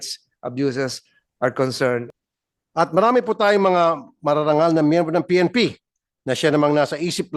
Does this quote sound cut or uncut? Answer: cut